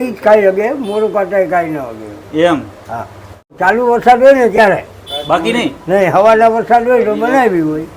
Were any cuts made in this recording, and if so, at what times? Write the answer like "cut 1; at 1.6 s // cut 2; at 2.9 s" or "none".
cut 1; at 3.5 s